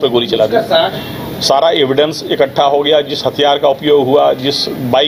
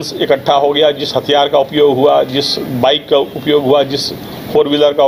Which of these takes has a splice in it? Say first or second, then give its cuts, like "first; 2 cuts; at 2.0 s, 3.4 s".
first; 1 cut; at 0.9 s